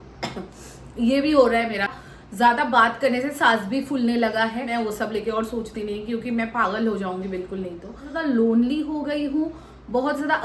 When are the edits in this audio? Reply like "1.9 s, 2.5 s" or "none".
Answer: 1.9 s, 4.7 s, 8.1 s